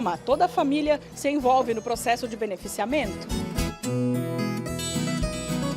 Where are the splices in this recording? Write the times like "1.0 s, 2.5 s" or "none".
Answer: 3.1 s